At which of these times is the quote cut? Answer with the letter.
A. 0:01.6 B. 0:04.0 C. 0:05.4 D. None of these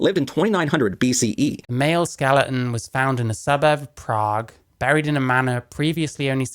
A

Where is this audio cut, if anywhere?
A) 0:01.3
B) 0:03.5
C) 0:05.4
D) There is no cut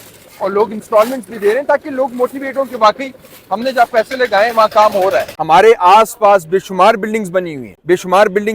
C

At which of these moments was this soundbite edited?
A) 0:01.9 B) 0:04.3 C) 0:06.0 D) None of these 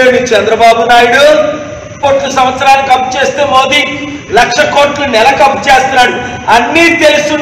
A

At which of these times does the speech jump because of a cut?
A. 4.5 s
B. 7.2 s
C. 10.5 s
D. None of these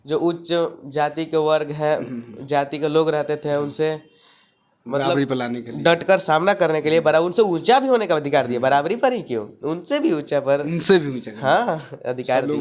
D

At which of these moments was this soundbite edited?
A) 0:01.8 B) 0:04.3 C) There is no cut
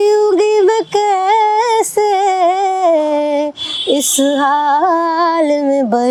C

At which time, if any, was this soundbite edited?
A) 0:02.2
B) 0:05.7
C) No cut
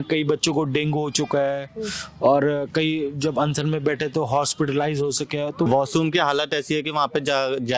B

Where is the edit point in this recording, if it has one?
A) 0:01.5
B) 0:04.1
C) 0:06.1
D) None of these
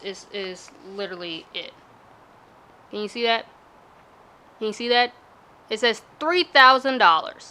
D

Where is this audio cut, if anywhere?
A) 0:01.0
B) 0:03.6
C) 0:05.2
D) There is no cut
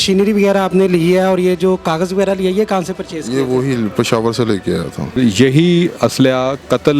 C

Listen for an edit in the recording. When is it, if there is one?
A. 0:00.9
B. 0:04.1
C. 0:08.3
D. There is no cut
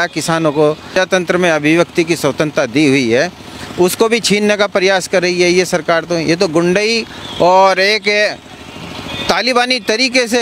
A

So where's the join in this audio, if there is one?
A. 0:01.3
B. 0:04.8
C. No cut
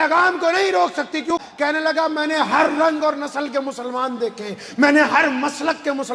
A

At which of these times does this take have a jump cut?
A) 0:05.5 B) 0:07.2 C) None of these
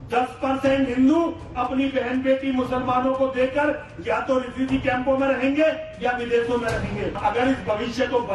B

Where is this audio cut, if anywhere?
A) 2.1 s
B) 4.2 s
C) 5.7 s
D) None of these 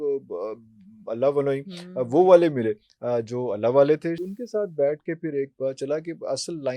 B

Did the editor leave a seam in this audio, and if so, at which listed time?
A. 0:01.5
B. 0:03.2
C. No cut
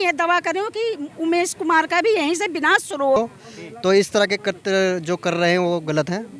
B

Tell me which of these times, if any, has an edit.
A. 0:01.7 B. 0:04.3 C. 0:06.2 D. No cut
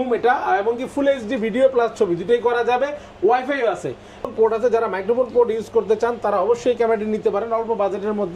B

